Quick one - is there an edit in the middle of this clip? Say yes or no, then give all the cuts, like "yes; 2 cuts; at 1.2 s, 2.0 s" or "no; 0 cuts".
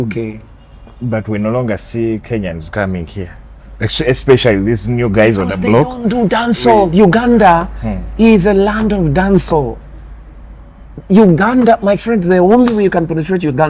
no; 0 cuts